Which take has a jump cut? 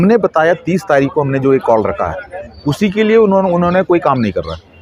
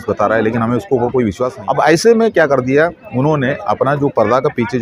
second; 1 cut; at 1.6 s

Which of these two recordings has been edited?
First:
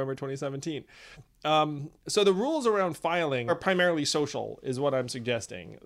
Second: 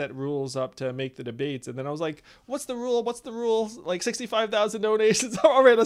first; 1 cut; at 3.5 s

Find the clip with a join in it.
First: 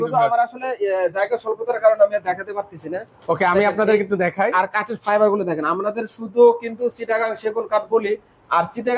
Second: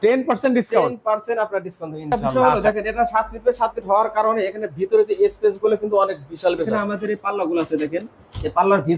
second; 2 cuts; at 2.4 s, 6.8 s

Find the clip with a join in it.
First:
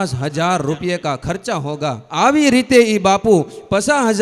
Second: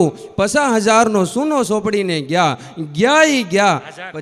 first; 1 cut; at 2.0 s

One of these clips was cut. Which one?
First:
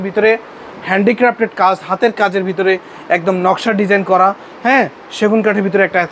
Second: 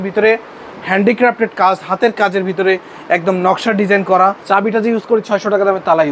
second; 1 cut; at 4.4 s

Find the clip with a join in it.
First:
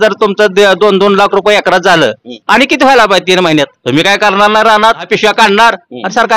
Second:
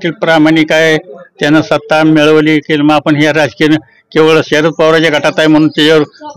first; 3 cuts; at 2.3 s, 3.8 s, 5.0 s

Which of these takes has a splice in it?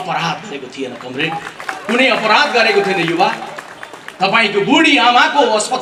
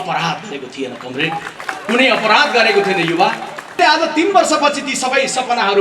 second; 1 cut; at 3.8 s

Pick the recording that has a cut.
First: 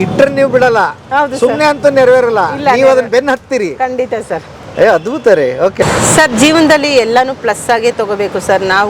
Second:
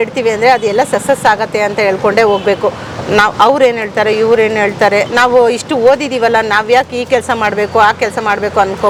first; 1 cut; at 5.8 s

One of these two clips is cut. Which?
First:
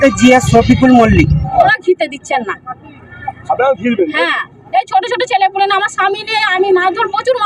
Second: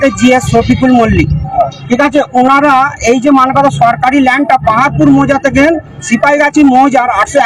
first; 1 cut; at 1.8 s

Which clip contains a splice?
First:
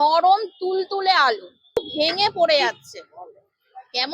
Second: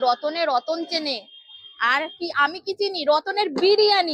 first; 1 cut; at 1.8 s

